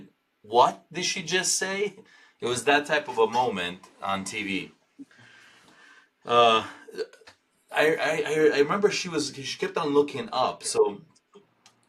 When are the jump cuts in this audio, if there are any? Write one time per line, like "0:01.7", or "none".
none